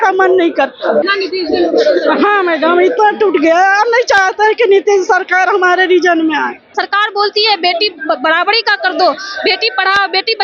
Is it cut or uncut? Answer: cut